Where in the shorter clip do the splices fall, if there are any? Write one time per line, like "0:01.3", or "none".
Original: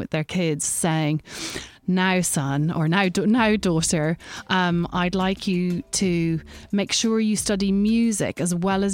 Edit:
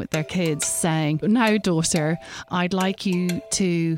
0:01.2
0:02.5

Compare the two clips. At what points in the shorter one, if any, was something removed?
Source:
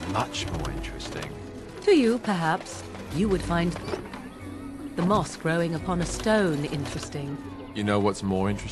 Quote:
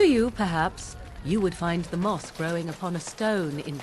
0:01.9

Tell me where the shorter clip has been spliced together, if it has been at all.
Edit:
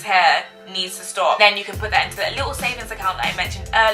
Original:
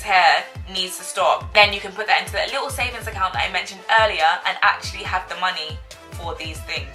0:01.4

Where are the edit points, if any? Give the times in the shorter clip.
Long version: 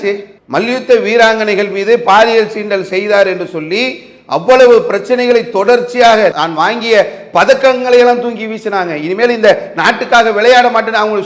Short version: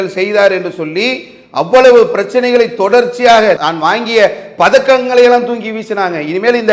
none

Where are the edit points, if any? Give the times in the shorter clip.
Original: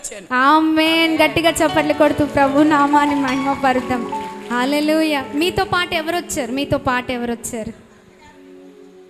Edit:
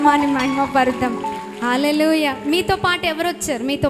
none

